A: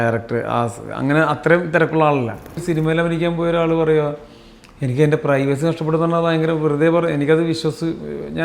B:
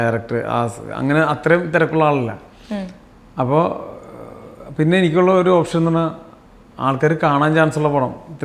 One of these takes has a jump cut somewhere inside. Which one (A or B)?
A